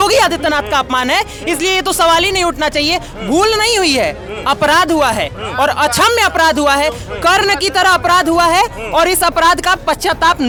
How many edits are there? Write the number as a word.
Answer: zero